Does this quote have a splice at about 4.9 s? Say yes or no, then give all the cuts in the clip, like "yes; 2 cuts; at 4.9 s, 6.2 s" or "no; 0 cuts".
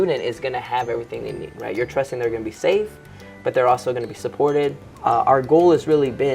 yes; 1 cut; at 4.9 s